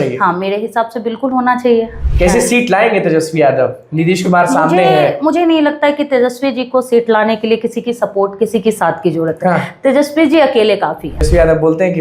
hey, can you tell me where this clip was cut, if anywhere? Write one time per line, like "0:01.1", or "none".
0:01.9
0:11.3